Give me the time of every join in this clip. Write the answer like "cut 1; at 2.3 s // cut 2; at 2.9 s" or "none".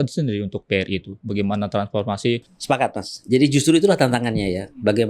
cut 1; at 2.5 s